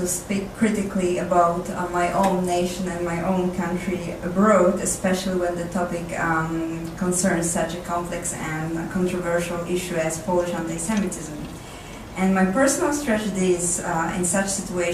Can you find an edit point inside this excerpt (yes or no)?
no